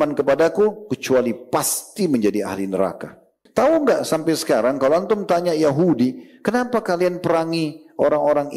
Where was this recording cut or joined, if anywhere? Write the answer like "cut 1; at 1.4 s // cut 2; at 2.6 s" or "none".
cut 1; at 3.3 s